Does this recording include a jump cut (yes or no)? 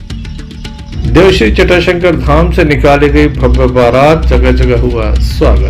yes